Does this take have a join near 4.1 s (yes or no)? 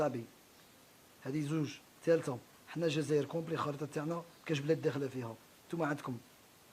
yes